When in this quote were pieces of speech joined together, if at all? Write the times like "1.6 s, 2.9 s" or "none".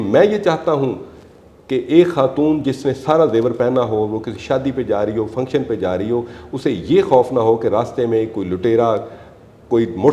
none